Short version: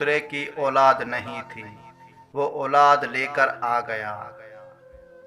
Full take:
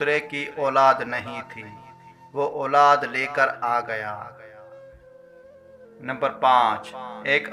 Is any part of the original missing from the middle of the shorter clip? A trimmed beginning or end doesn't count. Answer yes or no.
yes